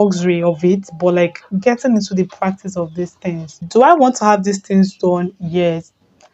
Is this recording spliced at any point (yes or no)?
yes